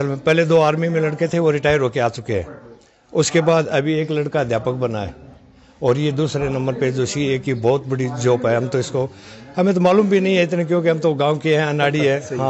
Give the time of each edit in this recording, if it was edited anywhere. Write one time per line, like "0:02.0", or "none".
none